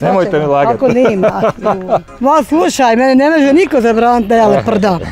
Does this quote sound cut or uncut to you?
cut